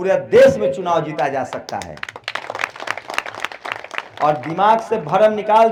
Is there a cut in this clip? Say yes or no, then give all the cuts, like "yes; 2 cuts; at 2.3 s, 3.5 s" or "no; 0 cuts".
no; 0 cuts